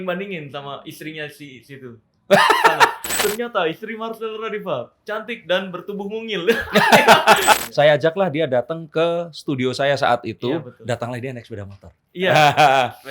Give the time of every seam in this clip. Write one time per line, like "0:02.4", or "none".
0:03.2
0:07.6